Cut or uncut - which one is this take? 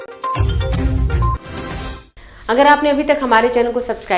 uncut